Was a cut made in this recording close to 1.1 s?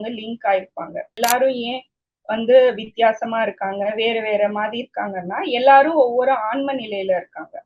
yes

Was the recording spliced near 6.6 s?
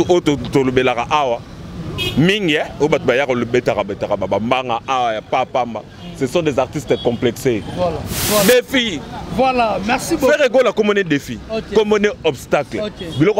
no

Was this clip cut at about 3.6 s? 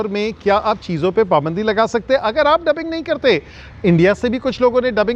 no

